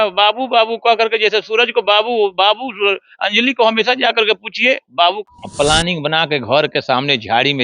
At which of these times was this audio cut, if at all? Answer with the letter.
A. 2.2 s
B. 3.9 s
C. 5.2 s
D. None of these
C